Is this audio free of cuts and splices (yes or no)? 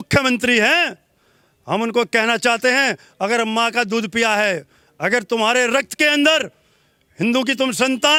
yes